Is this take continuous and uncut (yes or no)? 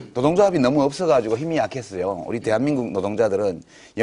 no